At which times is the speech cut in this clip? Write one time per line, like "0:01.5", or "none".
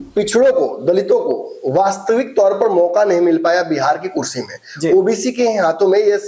none